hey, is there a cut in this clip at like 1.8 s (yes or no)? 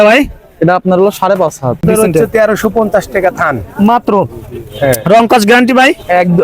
yes